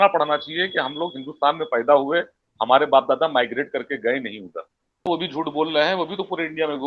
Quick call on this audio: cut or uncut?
cut